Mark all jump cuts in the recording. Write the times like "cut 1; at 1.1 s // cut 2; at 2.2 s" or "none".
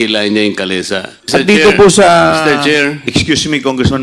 cut 1; at 1.1 s